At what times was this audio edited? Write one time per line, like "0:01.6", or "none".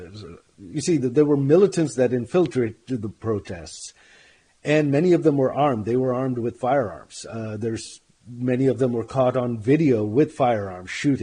none